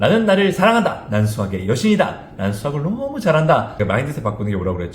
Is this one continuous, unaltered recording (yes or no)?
no